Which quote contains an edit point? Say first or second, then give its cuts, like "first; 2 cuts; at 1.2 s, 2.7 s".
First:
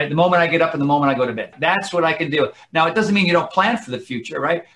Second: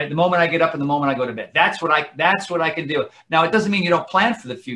first; 1 cut; at 1.5 s